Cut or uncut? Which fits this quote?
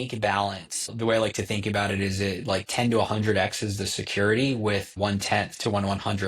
cut